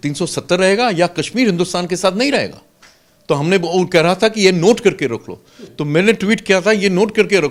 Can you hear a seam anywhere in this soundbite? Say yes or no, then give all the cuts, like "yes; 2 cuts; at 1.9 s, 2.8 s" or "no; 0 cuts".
no; 0 cuts